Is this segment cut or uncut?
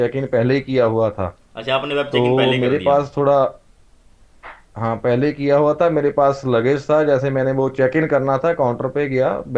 uncut